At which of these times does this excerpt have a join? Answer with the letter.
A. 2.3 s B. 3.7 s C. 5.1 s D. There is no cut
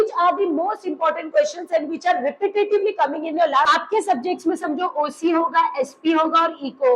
B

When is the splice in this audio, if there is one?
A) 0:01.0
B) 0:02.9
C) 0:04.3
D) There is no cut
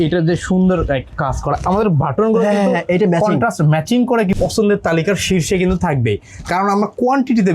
C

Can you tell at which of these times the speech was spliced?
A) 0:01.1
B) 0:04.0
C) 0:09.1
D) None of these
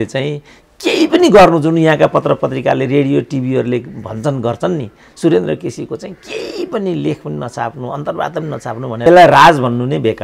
C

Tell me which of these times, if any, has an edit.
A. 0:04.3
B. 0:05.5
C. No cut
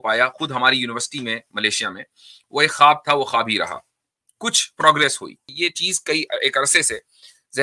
B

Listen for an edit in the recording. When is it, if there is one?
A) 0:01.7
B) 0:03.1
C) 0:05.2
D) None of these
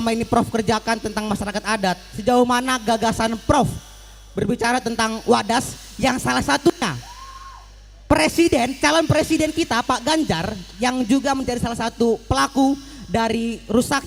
D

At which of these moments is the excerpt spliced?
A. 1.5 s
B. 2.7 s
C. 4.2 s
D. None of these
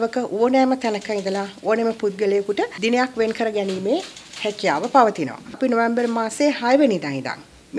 B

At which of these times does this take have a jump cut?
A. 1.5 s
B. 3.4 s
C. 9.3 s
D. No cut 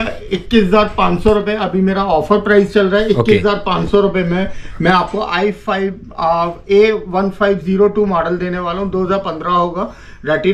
D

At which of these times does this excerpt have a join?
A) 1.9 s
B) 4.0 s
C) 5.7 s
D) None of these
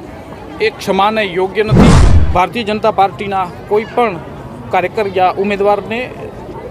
A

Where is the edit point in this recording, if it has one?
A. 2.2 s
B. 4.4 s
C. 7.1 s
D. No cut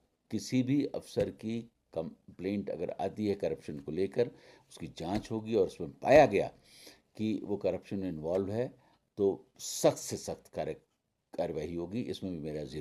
D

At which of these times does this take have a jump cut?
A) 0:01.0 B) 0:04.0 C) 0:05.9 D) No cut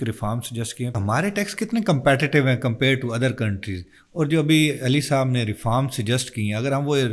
A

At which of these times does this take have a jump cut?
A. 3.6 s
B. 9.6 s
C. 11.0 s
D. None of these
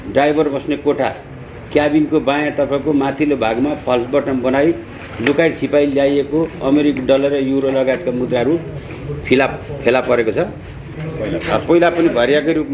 C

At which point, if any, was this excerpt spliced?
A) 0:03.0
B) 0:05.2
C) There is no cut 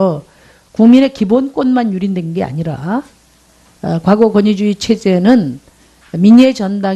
B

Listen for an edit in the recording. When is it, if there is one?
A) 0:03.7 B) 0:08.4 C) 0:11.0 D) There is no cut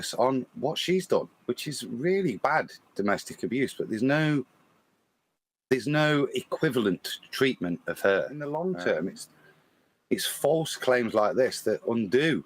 B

